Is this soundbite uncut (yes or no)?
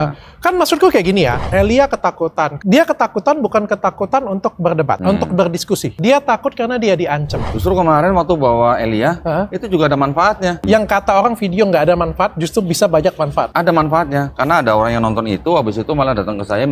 no